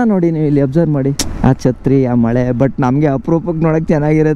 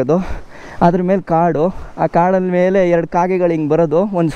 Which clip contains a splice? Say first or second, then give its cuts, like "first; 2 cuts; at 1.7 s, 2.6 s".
first; 1 cut; at 1.3 s